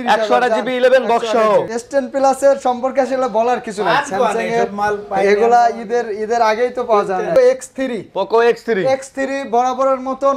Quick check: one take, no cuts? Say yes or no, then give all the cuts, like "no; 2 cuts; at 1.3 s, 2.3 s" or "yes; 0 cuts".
no; 2 cuts; at 1.8 s, 7.3 s